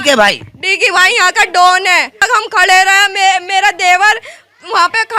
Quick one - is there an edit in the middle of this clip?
yes; 1 cut; at 2.2 s

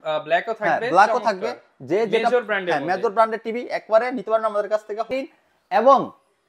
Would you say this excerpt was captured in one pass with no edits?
no; 1 cut; at 5.1 s

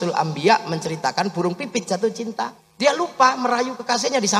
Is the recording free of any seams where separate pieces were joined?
no; 1 cut; at 2.6 s

